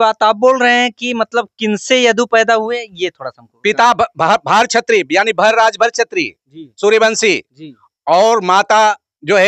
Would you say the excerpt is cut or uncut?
uncut